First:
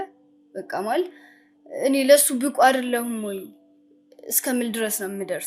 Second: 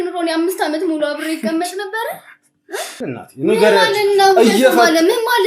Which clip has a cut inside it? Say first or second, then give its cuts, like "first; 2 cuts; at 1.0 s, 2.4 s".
second; 1 cut; at 3.0 s